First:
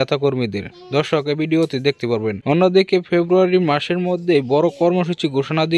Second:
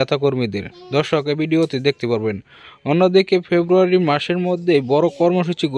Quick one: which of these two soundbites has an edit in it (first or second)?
first